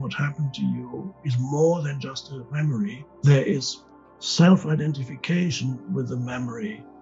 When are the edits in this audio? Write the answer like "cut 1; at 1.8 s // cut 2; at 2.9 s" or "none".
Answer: cut 1; at 3.1 s